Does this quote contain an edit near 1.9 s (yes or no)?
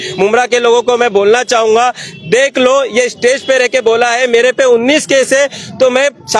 no